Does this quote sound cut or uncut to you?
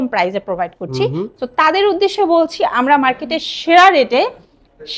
uncut